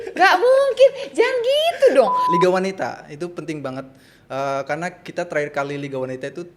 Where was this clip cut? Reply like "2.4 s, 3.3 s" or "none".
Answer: 2.2 s